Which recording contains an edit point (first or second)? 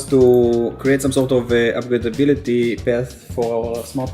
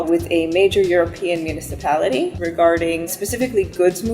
second